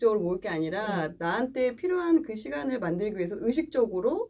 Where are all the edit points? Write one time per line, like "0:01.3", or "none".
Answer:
none